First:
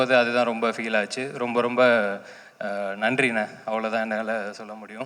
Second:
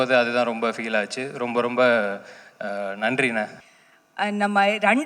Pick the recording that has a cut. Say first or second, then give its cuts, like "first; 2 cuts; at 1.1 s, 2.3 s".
second; 1 cut; at 3.6 s